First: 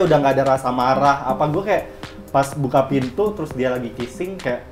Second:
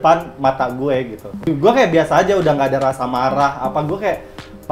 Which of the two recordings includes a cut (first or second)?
second